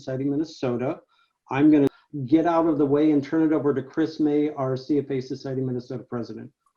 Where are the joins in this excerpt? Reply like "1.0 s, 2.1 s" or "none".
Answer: 2.0 s

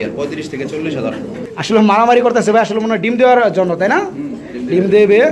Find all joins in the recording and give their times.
1.4 s

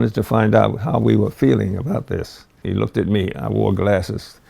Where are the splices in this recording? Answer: 2.5 s

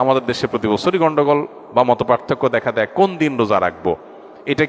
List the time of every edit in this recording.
none

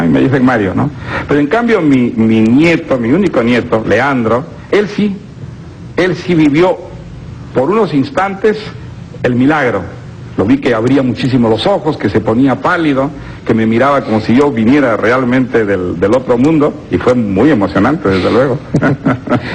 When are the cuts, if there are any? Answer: 6.2 s

